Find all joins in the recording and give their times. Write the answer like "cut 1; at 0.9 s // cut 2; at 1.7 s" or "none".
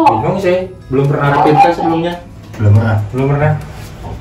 none

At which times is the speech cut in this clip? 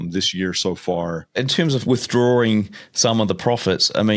cut 1; at 1.7 s

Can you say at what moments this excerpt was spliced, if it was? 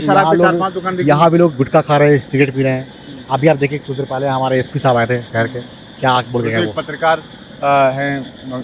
none

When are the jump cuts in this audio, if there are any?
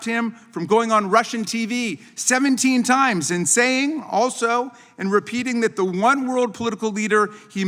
none

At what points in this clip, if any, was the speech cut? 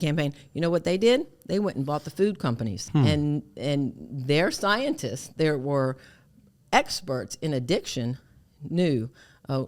cut 1; at 2.7 s

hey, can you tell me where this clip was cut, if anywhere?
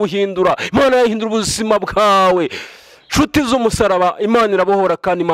none

